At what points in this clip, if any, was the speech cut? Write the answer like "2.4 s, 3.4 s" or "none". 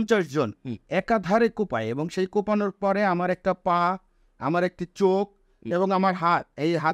none